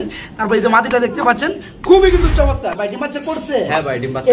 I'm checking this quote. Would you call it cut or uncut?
uncut